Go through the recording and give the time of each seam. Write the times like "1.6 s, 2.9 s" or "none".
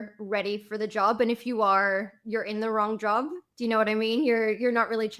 none

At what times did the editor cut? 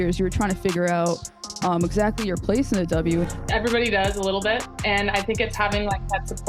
3.3 s

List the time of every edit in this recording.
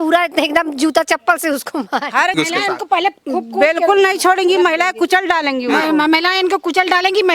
2.3 s

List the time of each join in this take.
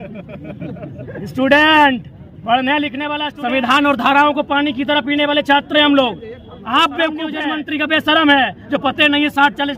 3.0 s, 7.5 s

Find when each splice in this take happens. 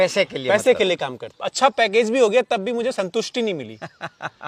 1.7 s

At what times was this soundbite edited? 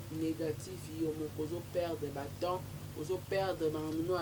none

